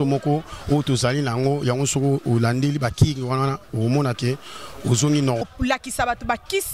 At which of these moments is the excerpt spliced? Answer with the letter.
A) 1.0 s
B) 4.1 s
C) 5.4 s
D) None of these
C